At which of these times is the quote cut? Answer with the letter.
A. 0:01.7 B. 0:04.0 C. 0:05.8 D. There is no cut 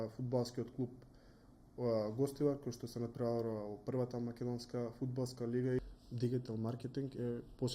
C